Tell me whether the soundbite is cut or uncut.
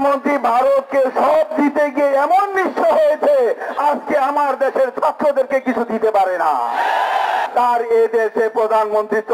cut